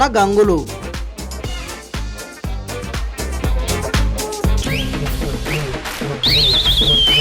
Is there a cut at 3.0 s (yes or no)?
no